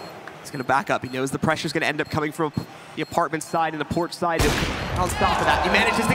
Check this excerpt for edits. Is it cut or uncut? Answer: uncut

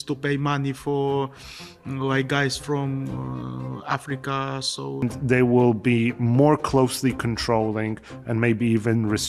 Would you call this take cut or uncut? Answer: cut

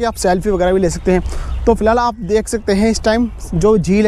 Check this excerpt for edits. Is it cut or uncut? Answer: uncut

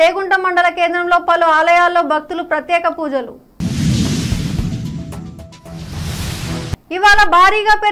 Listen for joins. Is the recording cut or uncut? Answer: uncut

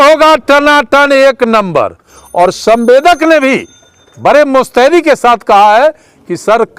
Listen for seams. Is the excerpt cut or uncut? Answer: cut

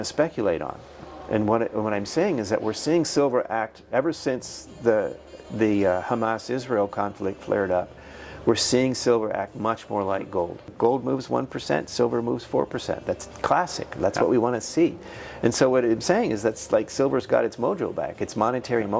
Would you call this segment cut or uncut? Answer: cut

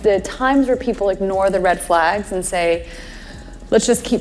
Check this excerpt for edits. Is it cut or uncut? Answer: uncut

